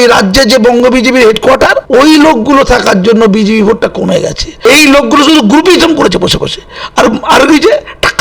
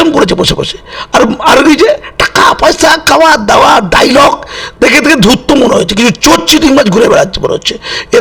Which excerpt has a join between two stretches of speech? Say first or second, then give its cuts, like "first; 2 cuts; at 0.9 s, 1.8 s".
first; 2 cuts; at 1.8 s, 4.5 s